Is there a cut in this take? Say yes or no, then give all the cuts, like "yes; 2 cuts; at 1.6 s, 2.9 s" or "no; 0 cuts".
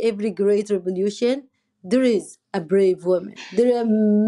yes; 1 cut; at 3.4 s